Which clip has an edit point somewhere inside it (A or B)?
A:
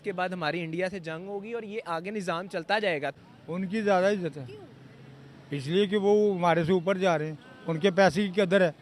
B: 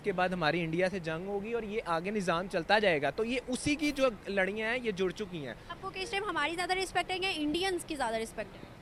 A